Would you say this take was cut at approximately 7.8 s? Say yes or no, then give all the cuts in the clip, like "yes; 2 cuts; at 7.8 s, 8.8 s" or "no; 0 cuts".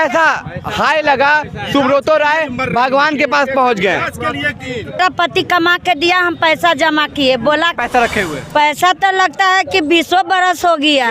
yes; 2 cuts; at 5.0 s, 7.8 s